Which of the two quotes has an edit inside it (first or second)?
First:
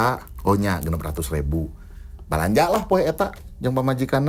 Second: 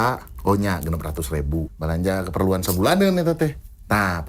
second